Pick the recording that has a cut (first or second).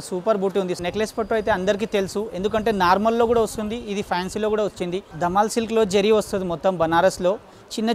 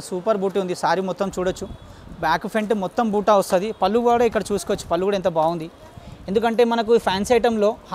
first